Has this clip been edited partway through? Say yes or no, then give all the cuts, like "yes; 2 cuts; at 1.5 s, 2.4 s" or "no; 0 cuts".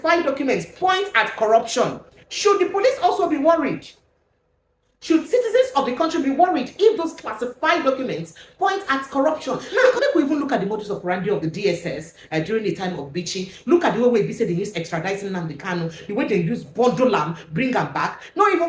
yes; 1 cut; at 10.0 s